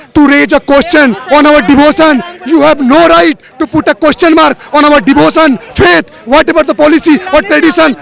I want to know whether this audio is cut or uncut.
uncut